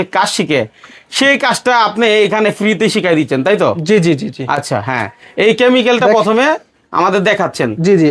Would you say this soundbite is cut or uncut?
uncut